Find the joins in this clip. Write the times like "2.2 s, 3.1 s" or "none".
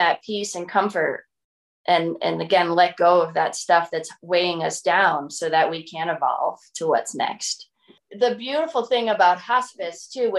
8.0 s